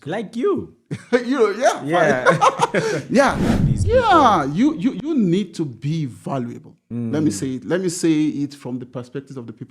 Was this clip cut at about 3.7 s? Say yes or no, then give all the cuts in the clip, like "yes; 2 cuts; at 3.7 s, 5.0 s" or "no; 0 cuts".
yes; 1 cut; at 3.7 s